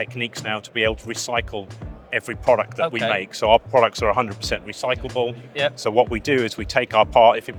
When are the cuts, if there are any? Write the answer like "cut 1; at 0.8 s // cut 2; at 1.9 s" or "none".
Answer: none